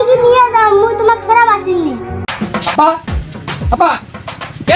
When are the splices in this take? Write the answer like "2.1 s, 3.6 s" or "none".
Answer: 2.2 s